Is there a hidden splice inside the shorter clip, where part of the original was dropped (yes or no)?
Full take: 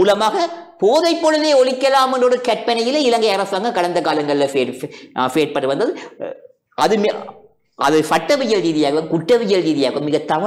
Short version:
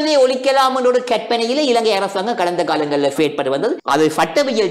yes